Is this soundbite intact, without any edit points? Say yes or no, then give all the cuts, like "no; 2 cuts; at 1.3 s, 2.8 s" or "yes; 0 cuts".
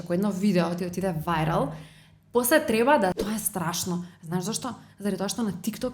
no; 1 cut; at 3.1 s